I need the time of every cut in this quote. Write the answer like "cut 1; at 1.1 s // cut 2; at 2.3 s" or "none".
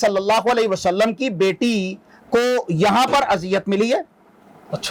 none